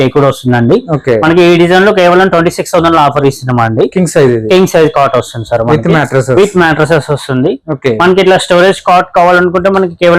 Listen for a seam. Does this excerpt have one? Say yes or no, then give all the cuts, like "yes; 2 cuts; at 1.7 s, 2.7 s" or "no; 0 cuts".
no; 0 cuts